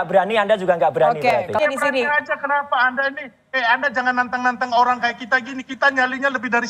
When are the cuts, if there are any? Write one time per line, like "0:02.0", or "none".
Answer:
0:01.5